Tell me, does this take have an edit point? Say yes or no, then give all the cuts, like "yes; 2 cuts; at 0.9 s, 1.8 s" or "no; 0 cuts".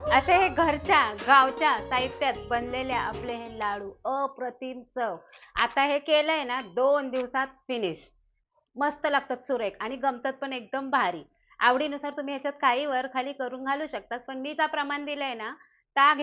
no; 0 cuts